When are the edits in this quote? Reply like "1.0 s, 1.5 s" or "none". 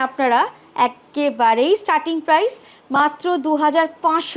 none